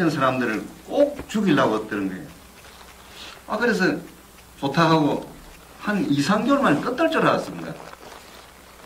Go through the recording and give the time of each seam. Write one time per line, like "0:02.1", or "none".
0:04.4